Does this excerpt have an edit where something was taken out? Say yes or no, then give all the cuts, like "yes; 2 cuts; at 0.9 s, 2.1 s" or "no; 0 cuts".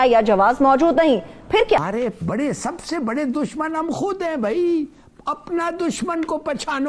yes; 1 cut; at 1.8 s